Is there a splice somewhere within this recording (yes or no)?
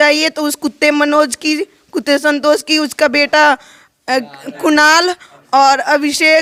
no